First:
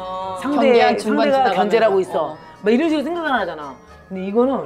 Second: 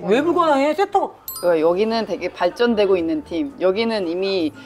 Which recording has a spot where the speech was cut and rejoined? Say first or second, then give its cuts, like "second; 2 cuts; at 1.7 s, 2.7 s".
second; 1 cut; at 1.2 s